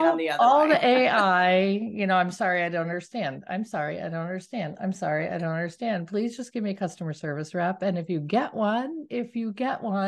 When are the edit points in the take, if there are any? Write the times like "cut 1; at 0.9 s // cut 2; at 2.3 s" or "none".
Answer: none